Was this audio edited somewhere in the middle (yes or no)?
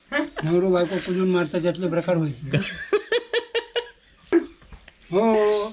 yes